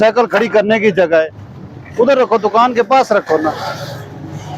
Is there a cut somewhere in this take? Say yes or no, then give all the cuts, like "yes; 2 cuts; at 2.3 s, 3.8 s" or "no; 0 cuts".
no; 0 cuts